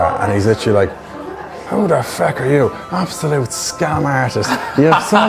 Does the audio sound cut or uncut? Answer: uncut